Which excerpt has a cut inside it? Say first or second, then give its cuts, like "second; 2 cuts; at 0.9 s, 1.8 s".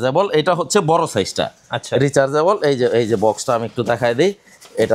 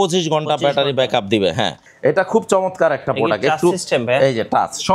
second; 1 cut; at 1.8 s